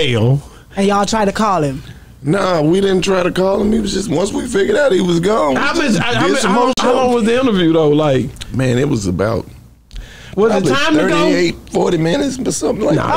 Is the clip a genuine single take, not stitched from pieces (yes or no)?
no